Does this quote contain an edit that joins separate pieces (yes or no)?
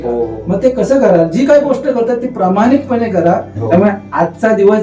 yes